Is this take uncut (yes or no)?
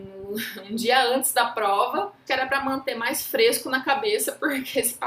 no